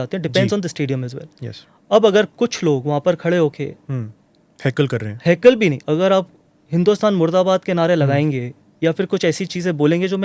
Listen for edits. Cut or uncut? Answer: uncut